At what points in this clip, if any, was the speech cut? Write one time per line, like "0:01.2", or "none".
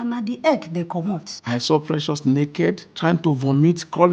0:01.3
0:02.9